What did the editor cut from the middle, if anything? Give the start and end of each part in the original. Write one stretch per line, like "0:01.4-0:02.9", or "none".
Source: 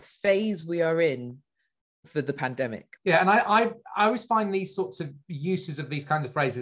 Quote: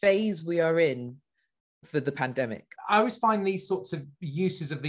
0:02.9-0:03.8